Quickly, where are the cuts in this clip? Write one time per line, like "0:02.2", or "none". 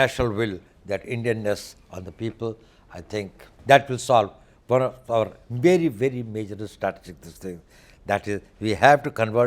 0:03.5